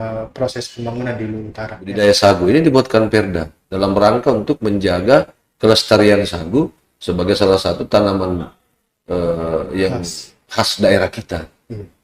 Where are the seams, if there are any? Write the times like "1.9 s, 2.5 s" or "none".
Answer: 2.0 s